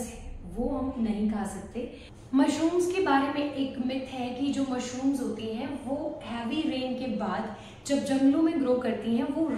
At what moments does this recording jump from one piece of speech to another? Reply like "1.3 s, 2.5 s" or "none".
2.3 s